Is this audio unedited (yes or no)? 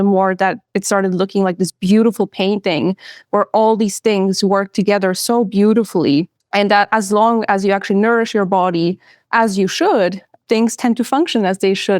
no